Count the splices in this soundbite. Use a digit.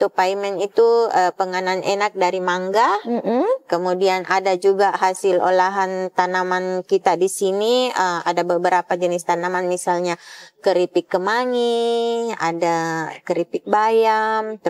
0